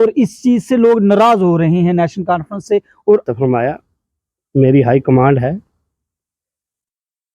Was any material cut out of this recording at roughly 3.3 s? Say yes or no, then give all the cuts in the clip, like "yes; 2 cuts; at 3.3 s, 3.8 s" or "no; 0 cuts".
yes; 1 cut; at 3.3 s